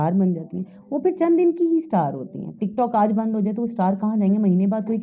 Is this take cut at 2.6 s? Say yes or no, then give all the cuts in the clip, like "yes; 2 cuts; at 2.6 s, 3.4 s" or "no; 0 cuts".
no; 0 cuts